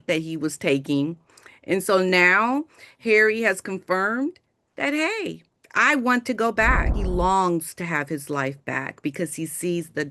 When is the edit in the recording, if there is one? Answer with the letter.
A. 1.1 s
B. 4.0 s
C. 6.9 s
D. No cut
C